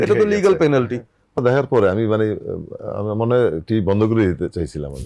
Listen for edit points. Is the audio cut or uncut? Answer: cut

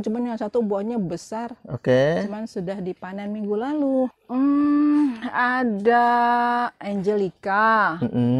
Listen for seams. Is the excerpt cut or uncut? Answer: cut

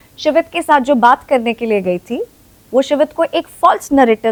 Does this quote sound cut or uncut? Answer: uncut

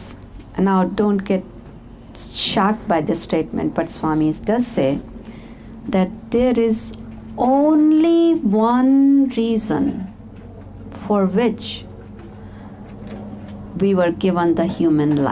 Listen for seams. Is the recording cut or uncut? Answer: uncut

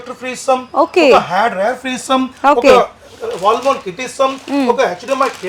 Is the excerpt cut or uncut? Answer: uncut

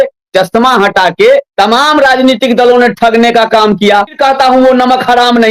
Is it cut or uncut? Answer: cut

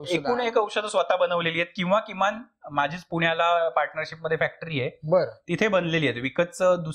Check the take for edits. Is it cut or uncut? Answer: uncut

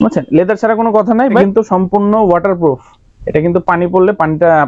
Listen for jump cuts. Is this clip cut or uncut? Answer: cut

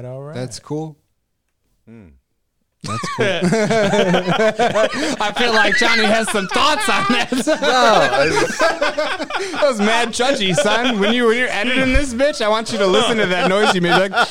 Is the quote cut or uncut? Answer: uncut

